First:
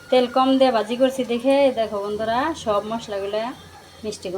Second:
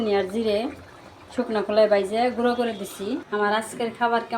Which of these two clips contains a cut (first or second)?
second